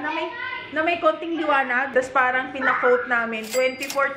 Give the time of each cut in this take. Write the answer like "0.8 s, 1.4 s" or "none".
1.9 s